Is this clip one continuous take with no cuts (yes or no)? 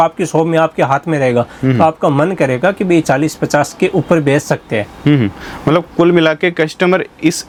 yes